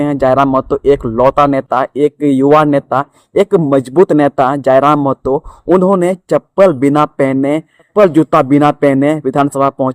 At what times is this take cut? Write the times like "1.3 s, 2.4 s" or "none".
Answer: 7.9 s